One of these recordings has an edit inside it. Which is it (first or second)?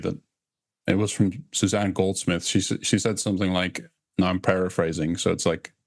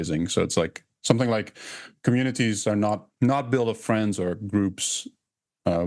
second